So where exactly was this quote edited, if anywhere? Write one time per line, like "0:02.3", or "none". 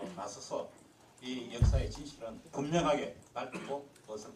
none